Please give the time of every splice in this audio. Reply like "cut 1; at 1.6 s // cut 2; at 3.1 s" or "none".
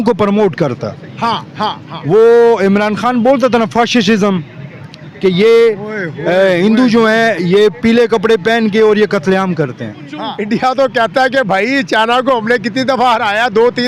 cut 1; at 10.3 s